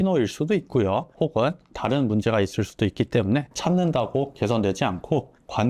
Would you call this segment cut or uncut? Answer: uncut